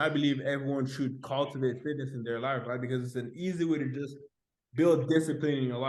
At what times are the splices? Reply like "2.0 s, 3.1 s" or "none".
none